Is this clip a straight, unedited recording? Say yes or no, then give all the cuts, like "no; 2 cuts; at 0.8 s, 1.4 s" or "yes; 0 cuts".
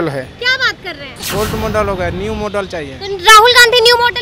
no; 1 cut; at 1.2 s